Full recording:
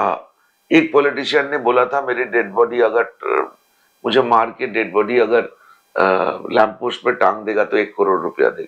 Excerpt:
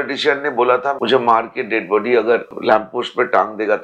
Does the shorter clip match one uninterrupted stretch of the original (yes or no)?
no